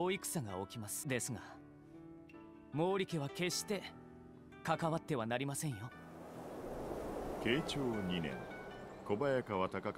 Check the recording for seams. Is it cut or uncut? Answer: cut